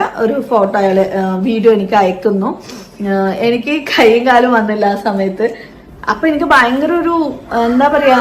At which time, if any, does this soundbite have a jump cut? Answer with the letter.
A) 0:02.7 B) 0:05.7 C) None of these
B